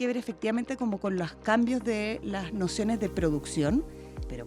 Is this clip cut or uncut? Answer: uncut